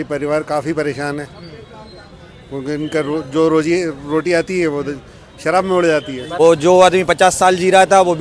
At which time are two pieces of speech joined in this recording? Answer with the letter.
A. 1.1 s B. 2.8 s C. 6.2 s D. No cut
C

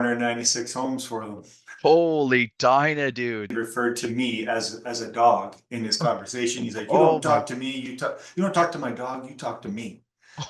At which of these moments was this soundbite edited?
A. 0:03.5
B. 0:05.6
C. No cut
A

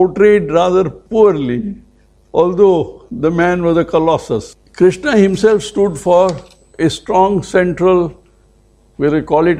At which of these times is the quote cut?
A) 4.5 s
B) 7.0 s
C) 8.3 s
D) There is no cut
A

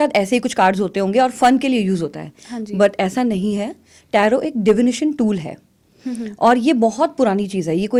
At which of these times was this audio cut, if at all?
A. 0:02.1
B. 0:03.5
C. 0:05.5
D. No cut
D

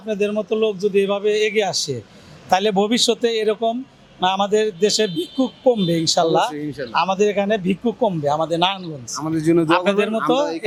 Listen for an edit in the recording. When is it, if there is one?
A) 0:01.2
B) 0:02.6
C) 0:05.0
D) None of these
D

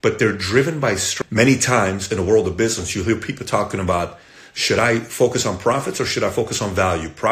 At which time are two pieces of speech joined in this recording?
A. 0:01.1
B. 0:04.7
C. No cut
A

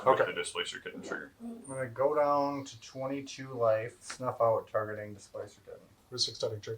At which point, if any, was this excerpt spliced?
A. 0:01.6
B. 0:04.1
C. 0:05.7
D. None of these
B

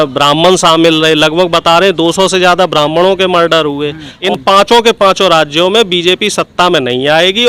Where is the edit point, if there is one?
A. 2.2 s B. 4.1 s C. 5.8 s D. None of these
B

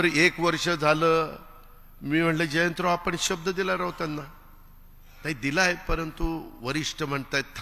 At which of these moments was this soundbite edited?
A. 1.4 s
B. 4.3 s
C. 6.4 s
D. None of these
D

